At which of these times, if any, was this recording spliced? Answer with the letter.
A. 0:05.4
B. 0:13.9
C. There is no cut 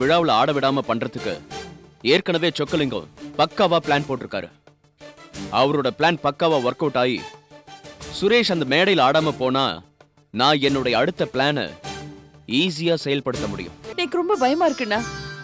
B